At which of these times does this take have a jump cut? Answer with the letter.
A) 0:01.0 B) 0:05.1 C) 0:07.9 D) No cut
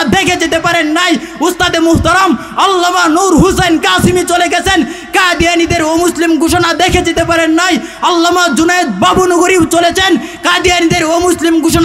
D